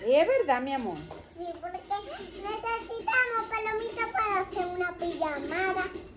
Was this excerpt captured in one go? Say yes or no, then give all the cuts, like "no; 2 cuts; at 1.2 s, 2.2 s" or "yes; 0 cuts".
yes; 0 cuts